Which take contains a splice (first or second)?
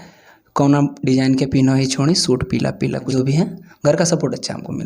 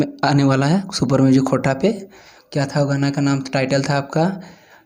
first